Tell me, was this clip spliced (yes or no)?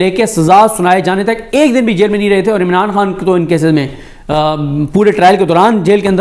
no